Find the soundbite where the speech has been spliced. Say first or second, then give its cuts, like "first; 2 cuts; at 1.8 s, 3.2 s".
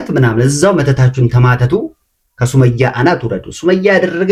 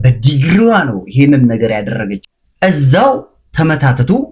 second; 1 cut; at 2.2 s